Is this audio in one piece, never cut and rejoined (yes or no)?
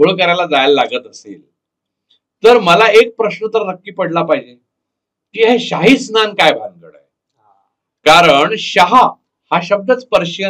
yes